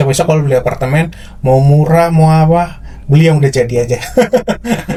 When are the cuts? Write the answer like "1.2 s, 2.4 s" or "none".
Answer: none